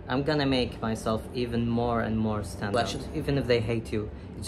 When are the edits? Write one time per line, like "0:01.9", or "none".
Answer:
0:02.7